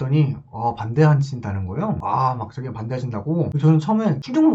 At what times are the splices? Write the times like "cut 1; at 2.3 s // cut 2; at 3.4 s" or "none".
none

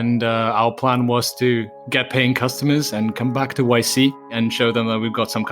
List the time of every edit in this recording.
cut 1; at 4.3 s

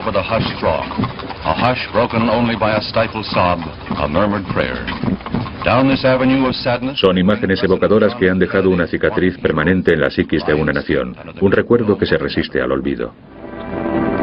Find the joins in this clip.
cut 1; at 3.5 s

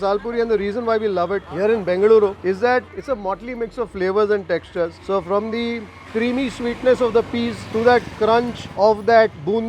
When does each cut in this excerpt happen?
cut 1; at 1.5 s // cut 2; at 2.8 s

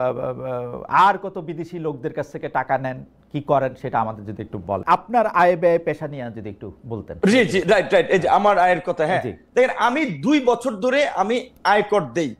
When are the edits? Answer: cut 1; at 4.8 s

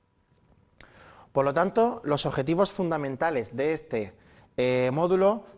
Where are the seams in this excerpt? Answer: none

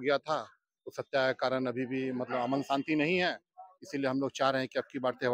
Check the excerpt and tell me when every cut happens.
none

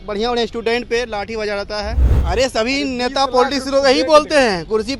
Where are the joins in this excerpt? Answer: cut 1; at 2.1 s

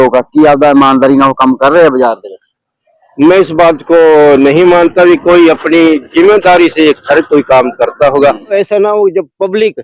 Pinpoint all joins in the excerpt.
cut 1; at 8.5 s

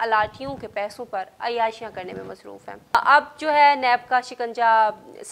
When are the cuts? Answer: cut 1; at 2.9 s

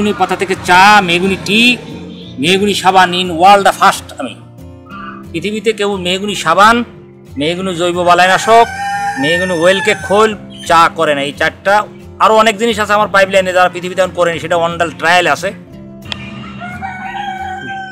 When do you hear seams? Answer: cut 1; at 15.9 s

